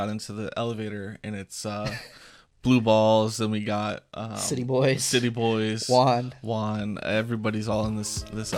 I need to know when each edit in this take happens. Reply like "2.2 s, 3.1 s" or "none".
none